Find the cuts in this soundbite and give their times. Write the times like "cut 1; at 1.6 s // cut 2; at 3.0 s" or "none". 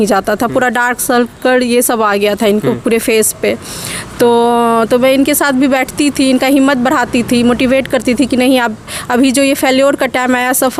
none